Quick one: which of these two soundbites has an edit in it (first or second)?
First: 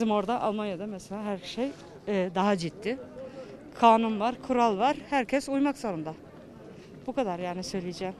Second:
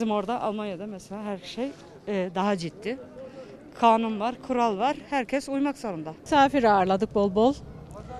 second